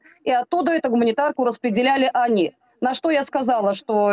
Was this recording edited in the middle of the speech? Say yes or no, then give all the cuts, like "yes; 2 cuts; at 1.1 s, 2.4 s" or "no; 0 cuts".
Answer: no; 0 cuts